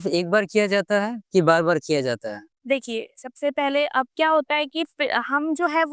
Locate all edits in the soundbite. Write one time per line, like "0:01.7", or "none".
none